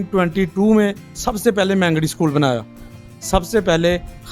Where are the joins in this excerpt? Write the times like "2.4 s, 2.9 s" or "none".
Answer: 2.9 s